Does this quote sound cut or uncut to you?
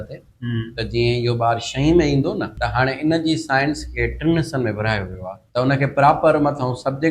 cut